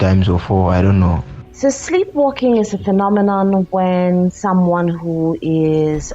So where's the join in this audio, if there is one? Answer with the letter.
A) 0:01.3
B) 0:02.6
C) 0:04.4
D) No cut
A